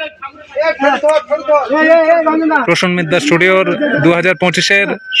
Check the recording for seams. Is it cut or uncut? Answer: uncut